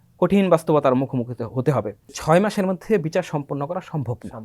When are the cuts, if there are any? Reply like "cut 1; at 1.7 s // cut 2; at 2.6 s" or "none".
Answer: cut 1; at 2.1 s

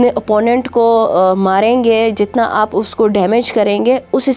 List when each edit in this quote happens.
none

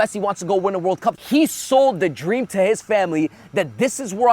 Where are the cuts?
cut 1; at 1.2 s

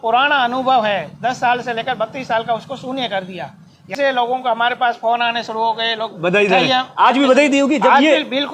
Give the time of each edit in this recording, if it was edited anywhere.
cut 1; at 3.9 s

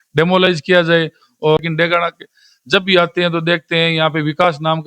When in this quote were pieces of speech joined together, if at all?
cut 1; at 1.6 s

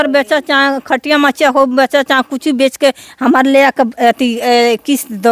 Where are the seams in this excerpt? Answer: none

